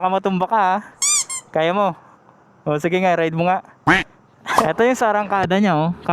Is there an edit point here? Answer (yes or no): yes